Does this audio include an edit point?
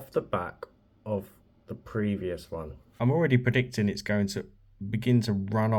yes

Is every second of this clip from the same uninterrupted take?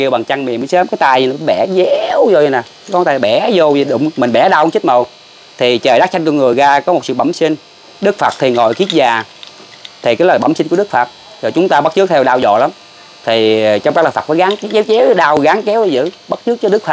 yes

